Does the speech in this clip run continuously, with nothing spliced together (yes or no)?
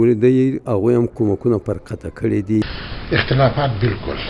no